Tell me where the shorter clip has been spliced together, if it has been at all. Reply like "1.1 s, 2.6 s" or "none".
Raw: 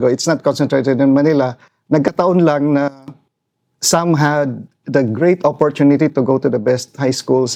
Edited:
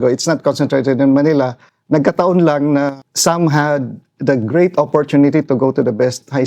3.1 s